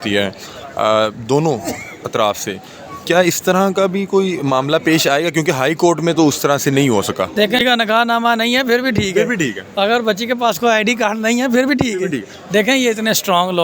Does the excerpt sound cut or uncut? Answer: cut